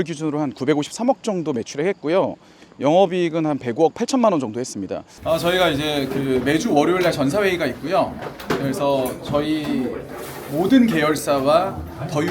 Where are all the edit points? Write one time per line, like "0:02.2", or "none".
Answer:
0:05.1